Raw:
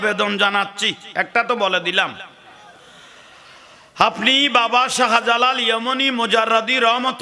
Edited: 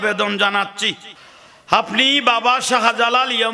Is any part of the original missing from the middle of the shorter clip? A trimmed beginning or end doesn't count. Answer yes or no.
yes